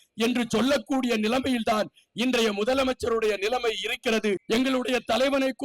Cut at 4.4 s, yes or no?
yes